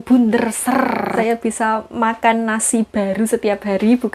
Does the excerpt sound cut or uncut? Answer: cut